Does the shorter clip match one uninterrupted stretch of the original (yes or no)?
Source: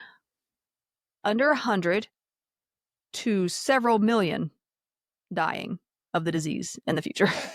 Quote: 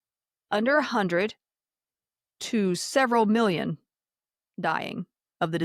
yes